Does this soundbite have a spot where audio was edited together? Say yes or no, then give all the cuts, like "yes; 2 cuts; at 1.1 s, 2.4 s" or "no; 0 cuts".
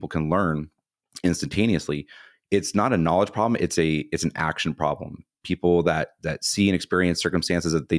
no; 0 cuts